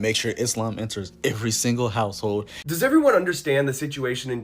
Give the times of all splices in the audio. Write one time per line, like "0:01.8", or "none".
0:02.7